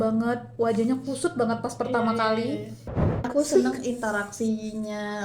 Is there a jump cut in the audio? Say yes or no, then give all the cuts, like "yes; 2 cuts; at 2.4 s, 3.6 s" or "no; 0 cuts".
yes; 1 cut; at 3.2 s